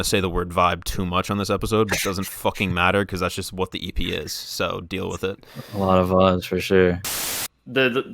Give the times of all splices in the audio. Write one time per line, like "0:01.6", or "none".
0:07.0

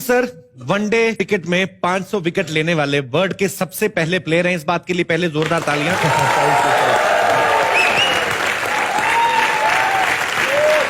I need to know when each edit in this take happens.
0:01.2

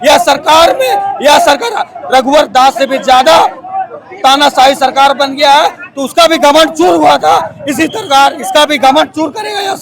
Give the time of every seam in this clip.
none

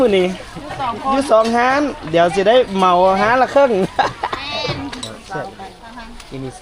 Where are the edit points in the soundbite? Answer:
0:05.1

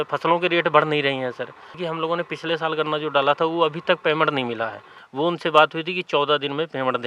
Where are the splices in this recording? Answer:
0:01.7
0:04.9

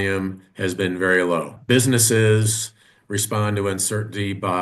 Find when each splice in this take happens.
0:01.5

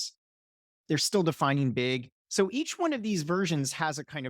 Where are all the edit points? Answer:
0:02.1

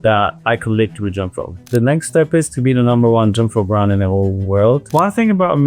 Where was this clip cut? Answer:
0:01.6
0:04.8

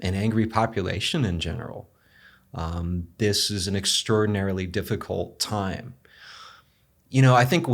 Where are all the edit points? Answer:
none

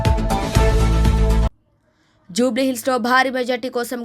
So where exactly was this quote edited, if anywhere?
0:01.4

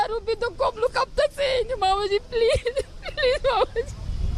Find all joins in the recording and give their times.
none

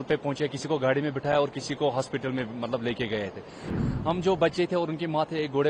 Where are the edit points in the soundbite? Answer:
0:03.7

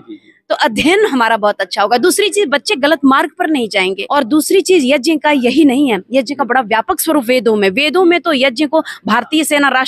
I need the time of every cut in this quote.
0:04.0

